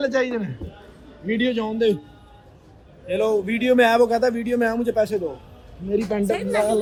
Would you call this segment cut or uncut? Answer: uncut